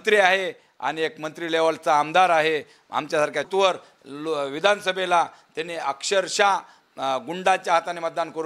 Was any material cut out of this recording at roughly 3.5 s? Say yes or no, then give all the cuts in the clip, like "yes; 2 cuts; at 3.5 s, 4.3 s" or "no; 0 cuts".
yes; 1 cut; at 3.5 s